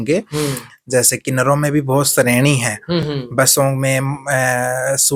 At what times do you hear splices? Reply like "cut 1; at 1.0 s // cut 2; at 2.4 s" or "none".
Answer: none

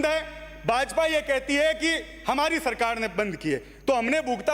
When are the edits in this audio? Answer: none

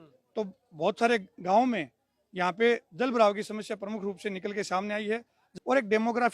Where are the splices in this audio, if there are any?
cut 1; at 5.4 s

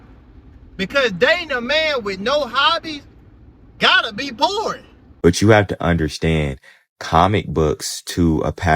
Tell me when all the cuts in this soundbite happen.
cut 1; at 5.1 s

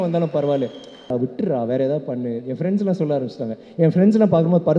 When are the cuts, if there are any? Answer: cut 1; at 1.1 s

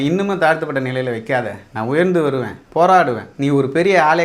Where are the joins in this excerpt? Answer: cut 1; at 3.3 s

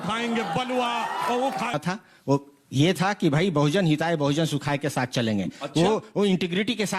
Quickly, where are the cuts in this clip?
cut 1; at 1.8 s // cut 2; at 5.6 s

